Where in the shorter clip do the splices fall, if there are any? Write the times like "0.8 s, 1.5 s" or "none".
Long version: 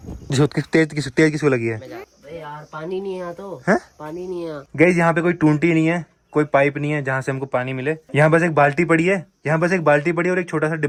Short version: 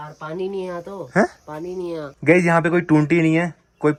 none